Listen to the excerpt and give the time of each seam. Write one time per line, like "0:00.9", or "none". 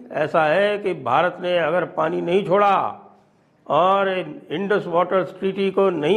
none